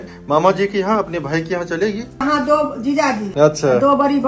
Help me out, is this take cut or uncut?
cut